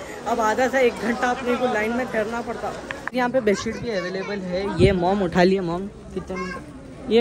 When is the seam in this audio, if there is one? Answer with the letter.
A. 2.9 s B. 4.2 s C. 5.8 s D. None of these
A